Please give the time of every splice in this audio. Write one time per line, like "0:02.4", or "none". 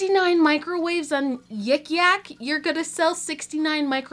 none